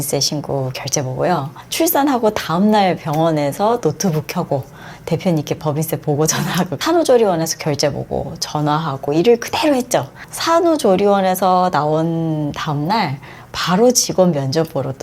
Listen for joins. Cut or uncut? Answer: cut